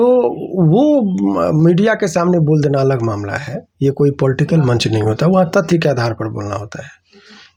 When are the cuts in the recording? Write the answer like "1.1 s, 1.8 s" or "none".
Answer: none